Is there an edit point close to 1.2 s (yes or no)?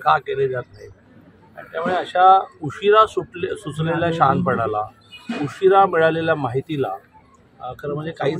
no